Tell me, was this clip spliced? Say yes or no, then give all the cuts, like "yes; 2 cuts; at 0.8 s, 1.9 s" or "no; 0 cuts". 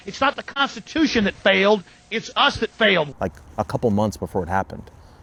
no; 0 cuts